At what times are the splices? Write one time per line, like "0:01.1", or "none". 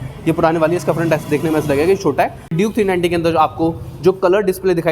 0:02.6